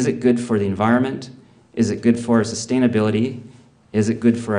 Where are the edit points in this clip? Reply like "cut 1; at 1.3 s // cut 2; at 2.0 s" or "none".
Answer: none